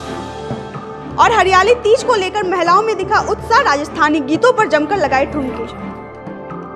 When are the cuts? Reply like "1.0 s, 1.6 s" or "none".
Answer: none